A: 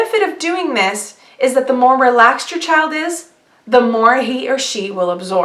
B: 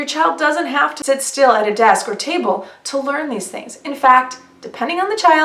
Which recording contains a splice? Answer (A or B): B